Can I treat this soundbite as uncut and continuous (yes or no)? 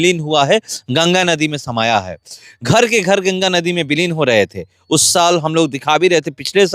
yes